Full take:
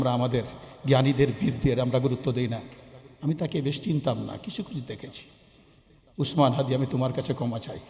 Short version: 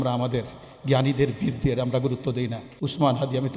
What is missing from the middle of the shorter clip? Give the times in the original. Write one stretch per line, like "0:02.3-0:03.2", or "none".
0:02.7-0:06.0